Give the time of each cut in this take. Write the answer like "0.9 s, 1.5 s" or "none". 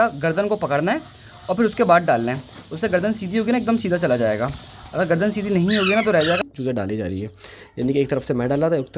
6.4 s